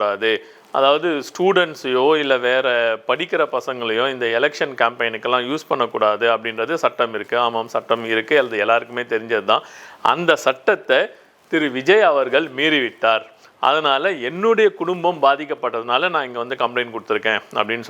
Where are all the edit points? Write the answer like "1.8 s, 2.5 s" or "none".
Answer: none